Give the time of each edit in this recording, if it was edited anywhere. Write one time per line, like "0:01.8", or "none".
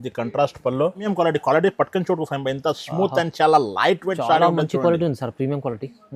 0:01.0